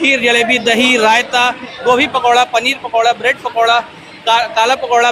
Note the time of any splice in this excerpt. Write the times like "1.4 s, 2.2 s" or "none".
none